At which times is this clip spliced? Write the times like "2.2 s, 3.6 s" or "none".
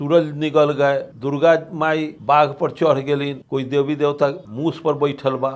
1.1 s, 2.1 s, 3.4 s, 4.5 s